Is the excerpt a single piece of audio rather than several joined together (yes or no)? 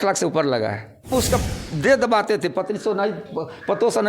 no